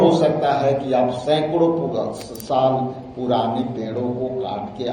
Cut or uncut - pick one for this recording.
uncut